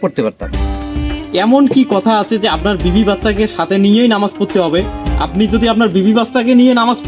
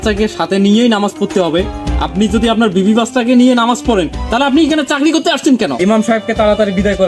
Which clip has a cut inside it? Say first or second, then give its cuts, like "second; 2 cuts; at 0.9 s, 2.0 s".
second; 1 cut; at 5.7 s